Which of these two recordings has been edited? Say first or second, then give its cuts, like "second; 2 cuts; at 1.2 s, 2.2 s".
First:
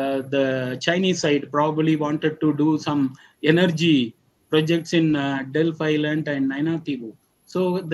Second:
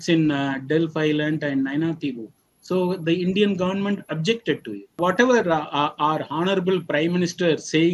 second; 1 cut; at 5.0 s